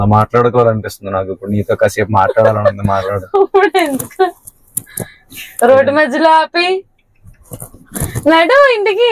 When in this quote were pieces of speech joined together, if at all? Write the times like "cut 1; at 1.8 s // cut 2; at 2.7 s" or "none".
none